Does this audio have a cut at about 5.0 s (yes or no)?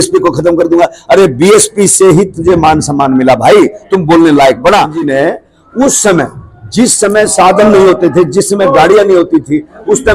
yes